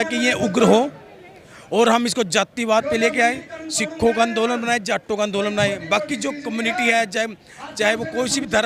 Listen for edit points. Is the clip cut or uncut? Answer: uncut